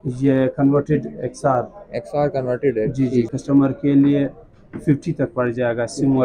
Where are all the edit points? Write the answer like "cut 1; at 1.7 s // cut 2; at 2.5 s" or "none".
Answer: cut 1; at 3.3 s